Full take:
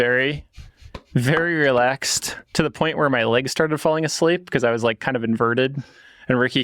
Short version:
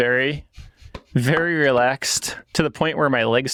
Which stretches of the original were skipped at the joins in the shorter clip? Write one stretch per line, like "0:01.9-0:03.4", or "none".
none